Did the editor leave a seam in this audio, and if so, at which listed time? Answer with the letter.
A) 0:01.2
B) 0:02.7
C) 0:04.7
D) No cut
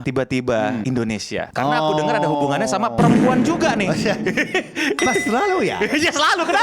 A